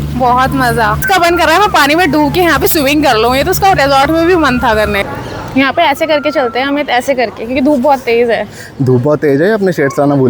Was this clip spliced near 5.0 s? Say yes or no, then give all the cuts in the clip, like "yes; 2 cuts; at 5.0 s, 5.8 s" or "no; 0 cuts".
yes; 2 cuts; at 1.0 s, 5.0 s